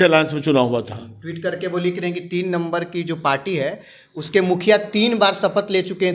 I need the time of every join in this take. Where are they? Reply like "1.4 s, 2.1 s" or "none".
none